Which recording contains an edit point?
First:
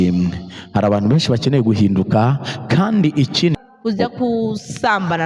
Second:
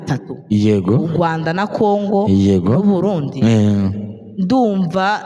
first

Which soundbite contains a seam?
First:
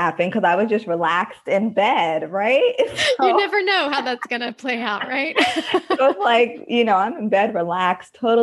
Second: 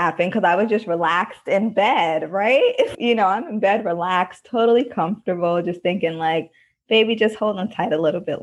second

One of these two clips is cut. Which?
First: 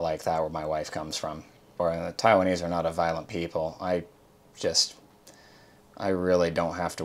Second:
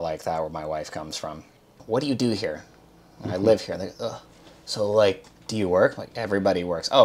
second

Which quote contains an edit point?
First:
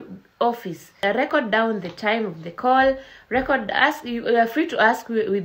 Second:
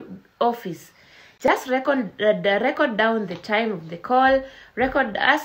first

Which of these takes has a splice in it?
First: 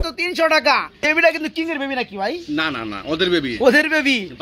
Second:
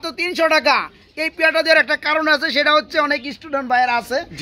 first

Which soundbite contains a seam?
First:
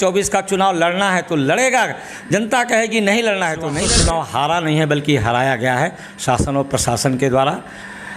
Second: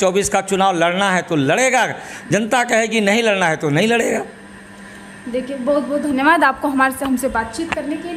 first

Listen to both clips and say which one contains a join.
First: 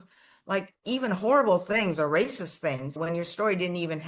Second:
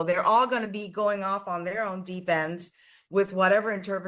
first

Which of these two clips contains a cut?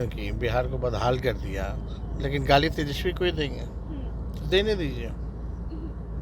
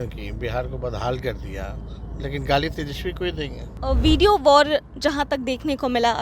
second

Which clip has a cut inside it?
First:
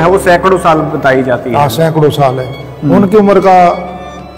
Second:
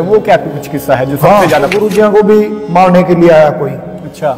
second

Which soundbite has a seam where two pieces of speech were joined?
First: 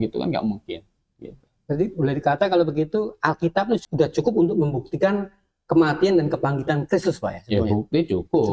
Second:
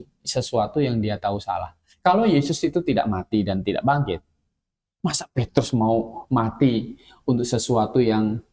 first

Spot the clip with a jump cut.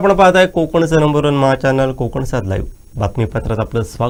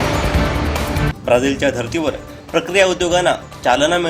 second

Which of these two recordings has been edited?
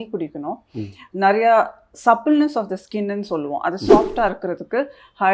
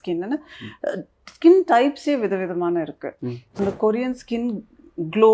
second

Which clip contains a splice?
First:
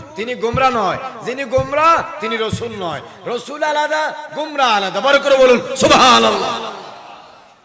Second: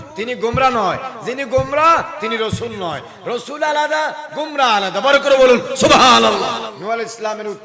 second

